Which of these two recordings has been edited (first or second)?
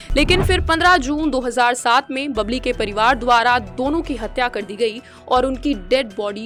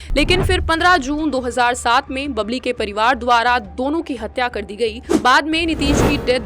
second